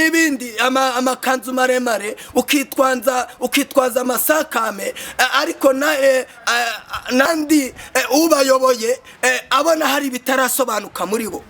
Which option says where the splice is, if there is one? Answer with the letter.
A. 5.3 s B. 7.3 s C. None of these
B